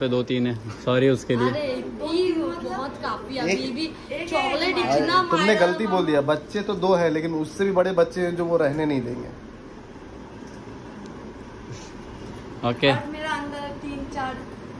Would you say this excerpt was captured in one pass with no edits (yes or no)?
yes